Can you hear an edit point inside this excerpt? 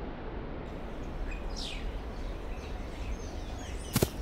yes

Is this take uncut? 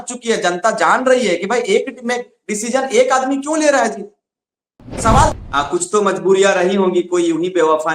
no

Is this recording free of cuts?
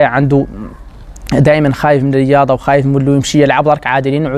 yes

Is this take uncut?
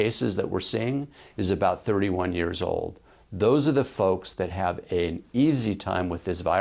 yes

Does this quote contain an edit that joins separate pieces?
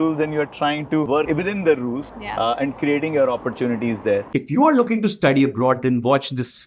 no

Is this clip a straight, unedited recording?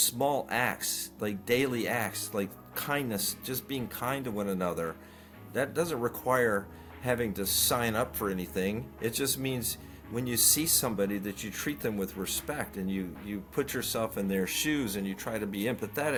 yes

